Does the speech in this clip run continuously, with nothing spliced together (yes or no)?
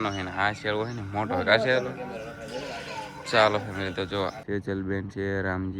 no